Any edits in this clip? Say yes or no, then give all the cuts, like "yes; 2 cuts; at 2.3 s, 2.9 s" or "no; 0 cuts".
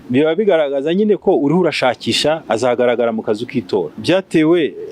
yes; 2 cuts; at 2.4 s, 3.9 s